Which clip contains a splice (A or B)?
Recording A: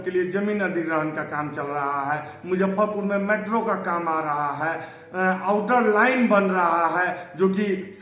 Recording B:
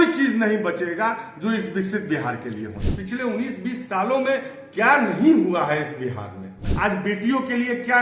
B